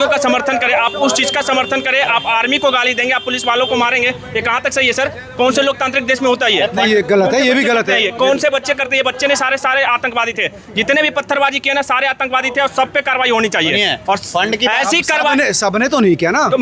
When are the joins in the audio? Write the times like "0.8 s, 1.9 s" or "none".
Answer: none